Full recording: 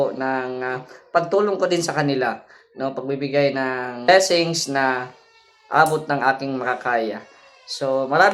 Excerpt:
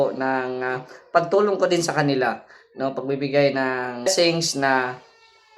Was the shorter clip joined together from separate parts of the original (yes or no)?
yes